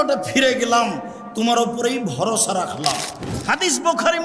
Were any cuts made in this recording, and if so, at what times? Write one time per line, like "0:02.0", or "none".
0:03.2